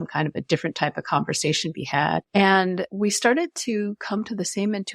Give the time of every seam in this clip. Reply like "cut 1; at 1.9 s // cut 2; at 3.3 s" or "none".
cut 1; at 2.3 s // cut 2; at 2.9 s